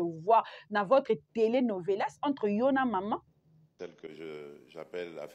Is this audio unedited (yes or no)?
no